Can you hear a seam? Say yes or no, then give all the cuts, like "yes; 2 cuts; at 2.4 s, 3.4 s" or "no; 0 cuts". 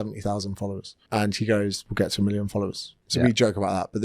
yes; 3 cuts; at 0.9 s, 1.9 s, 3.0 s